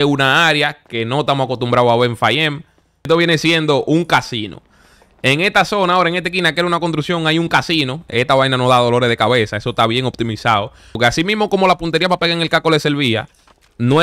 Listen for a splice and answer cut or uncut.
cut